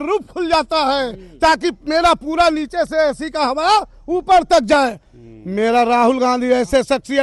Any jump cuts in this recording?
no; 0 cuts

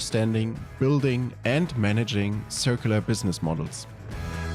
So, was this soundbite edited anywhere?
no; 0 cuts

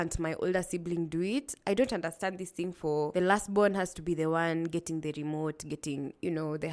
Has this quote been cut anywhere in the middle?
yes; 1 cut; at 3.1 s

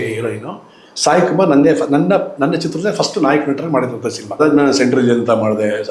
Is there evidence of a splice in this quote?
yes; 1 cut; at 4.4 s

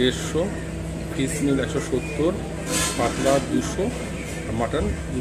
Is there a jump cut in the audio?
no; 0 cuts

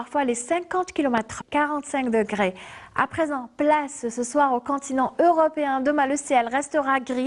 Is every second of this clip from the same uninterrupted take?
yes; 0 cuts

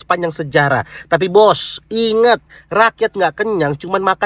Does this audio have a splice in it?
no; 0 cuts

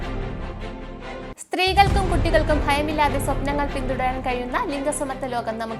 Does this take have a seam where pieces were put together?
yes; 1 cut; at 1.4 s

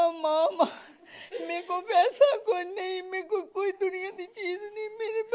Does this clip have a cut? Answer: no; 0 cuts

